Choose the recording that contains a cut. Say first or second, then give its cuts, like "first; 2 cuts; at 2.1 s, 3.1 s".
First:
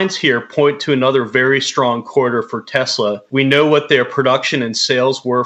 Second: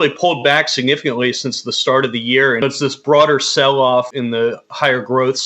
second; 2 cuts; at 2.6 s, 4.1 s